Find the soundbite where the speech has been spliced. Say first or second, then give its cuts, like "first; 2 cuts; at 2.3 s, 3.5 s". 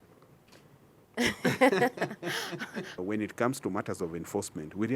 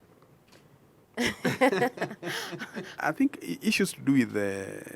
first; 1 cut; at 3.0 s